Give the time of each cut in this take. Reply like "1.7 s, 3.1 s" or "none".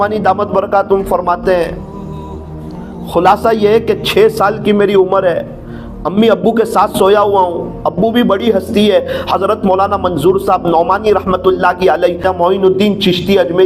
12.2 s